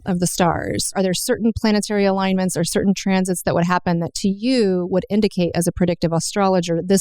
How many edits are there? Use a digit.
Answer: 1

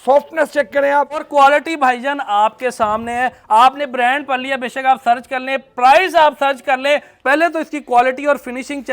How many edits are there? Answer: 2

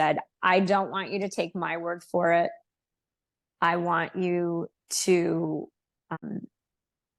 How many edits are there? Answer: 1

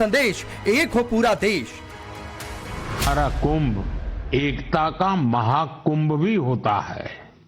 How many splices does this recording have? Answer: 1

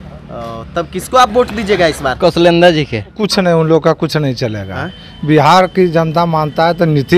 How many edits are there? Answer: 1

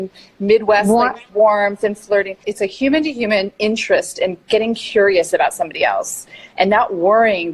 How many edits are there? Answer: 1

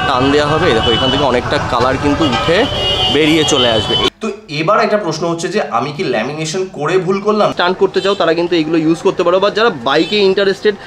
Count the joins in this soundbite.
2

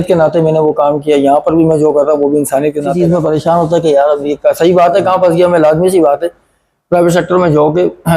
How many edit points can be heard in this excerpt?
1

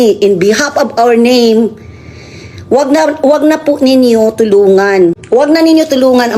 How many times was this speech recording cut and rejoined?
1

